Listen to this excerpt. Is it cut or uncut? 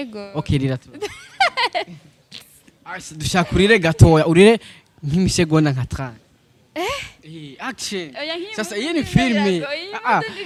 uncut